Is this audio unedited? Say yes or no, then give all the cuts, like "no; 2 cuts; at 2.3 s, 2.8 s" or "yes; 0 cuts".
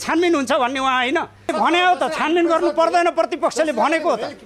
no; 1 cut; at 1.5 s